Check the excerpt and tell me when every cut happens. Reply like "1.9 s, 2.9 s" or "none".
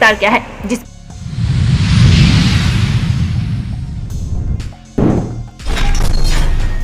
0.8 s, 5.5 s